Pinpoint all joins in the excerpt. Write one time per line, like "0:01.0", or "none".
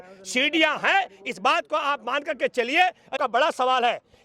0:03.1

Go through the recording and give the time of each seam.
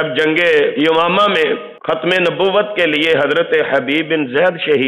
0:00.7
0:01.7

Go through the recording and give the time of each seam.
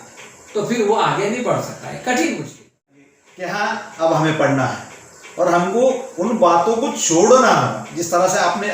0:03.1

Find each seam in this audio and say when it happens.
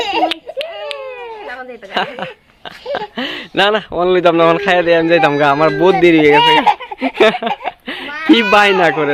none

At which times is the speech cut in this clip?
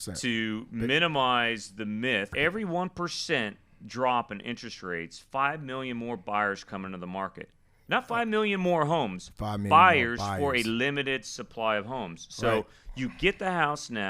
0:02.3

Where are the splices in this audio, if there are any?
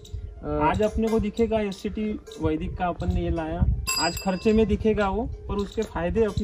0:03.8

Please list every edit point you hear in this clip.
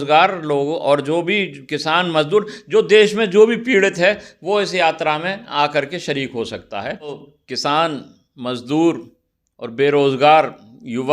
0:07.2

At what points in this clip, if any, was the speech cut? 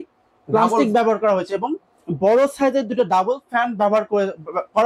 none

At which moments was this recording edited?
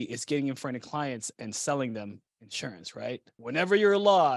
0:03.3

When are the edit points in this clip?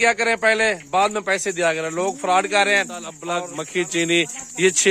0:03.2

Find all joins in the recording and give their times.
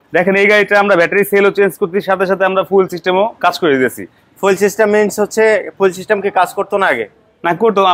none

